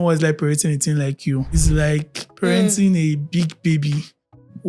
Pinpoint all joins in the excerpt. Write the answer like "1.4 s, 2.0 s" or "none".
1.5 s